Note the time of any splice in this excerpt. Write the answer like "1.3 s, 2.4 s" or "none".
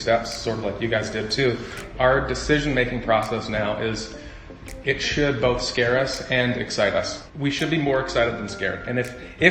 1.8 s, 7.2 s